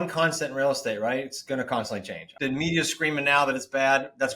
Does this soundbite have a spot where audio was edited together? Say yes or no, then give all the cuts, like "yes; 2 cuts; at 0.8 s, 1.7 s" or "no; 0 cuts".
yes; 1 cut; at 2.2 s